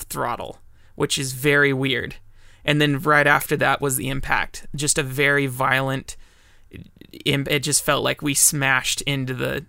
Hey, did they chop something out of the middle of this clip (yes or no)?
no